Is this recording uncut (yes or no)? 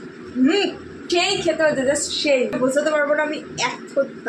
no